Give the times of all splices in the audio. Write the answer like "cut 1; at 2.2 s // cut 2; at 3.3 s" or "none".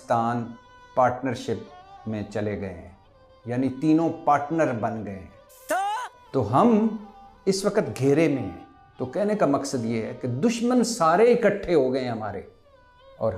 none

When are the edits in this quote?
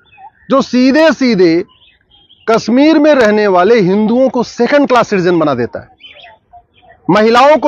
none

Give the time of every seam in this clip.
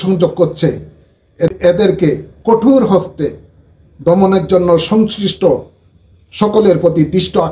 cut 1; at 1.5 s

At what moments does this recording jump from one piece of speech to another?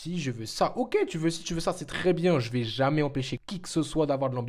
none

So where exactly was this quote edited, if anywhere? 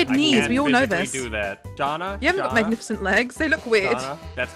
none

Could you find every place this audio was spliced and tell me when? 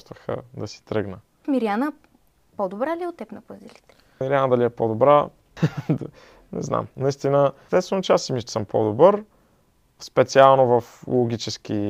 cut 1; at 1.4 s // cut 2; at 4.2 s // cut 3; at 5.4 s // cut 4; at 7.6 s

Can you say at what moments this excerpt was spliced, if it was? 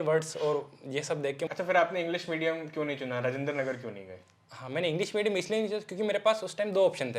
cut 1; at 1.5 s

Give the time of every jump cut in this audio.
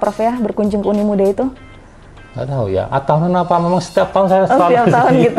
none

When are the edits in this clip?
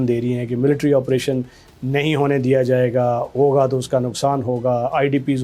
none

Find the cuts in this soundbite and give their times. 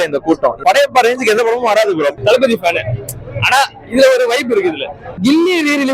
cut 1; at 2.2 s // cut 2; at 5.1 s

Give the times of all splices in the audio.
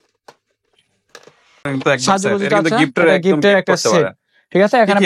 cut 1; at 1.7 s

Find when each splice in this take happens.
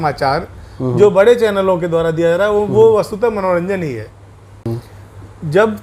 cut 1; at 4.7 s

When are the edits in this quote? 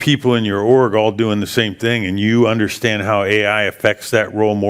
none

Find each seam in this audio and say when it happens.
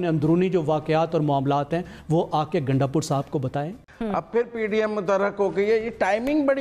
cut 1; at 3.8 s

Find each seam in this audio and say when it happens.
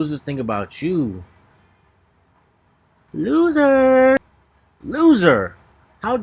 cut 1; at 3.1 s

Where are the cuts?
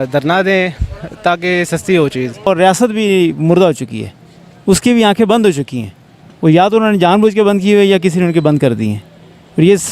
cut 1; at 2.5 s

